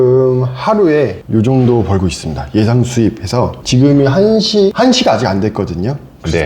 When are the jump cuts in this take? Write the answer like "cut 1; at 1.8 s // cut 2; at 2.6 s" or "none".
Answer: cut 1; at 1.2 s // cut 2; at 3.6 s // cut 3; at 4.7 s